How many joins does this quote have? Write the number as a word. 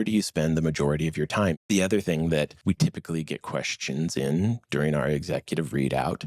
two